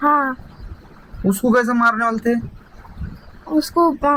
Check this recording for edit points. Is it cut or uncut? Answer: uncut